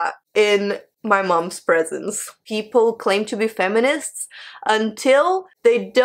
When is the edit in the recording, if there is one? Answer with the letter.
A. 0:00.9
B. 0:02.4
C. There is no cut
B